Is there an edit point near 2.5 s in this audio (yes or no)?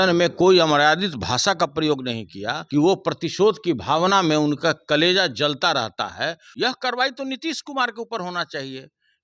yes